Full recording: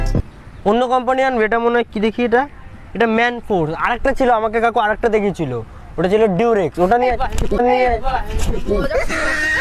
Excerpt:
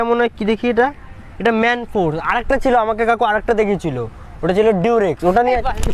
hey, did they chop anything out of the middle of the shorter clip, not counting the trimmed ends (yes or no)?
no